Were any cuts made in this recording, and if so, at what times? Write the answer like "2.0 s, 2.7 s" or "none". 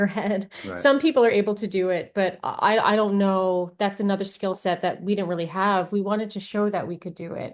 none

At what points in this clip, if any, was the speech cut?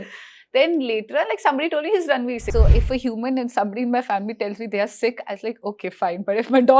2.4 s

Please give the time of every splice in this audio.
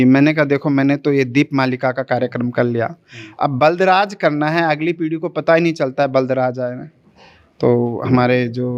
none

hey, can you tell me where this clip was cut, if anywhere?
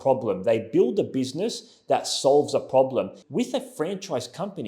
3.2 s

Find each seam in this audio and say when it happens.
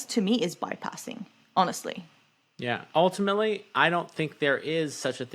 2.8 s

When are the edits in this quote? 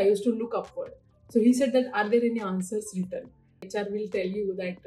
3.6 s

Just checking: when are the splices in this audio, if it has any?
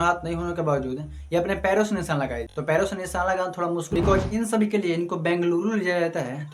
2.5 s, 3.9 s

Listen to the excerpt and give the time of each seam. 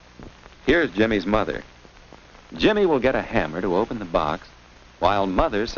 none

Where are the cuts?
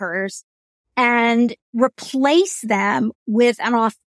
1.6 s

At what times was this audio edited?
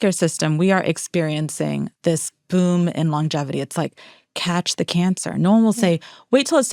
none

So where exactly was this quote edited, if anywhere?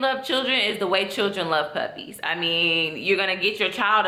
none

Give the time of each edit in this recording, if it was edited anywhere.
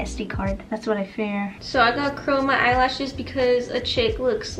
1.4 s

